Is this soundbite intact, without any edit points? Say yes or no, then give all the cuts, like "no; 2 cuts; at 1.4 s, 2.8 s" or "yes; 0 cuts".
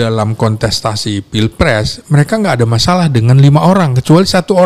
yes; 0 cuts